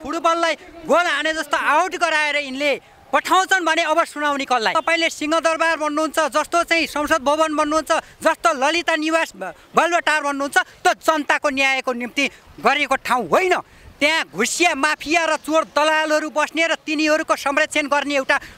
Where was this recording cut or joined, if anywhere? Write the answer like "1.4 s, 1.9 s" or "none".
4.7 s

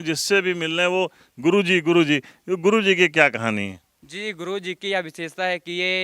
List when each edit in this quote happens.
none

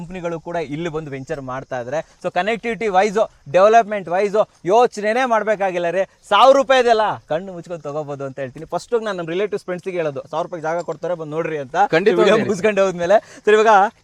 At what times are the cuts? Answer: none

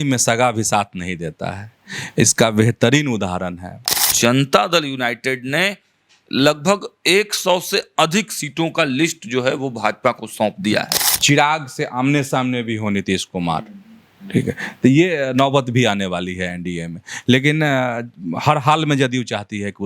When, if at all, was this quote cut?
4.1 s, 11.1 s

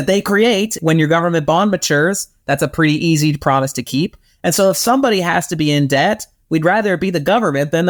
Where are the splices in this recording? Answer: none

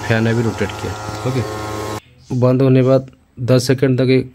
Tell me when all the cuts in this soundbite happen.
2.0 s

